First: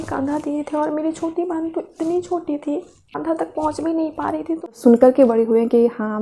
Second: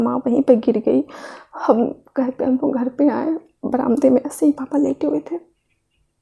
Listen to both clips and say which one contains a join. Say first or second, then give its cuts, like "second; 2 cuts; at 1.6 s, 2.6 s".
first; 2 cuts; at 3.0 s, 4.7 s